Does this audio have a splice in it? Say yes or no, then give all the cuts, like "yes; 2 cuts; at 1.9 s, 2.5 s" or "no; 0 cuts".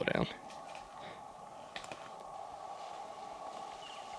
yes; 1 cut; at 2.3 s